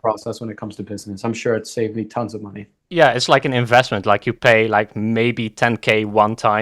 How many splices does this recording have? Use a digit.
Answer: 1